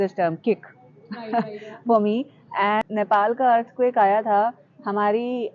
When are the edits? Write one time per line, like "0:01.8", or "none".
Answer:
0:02.8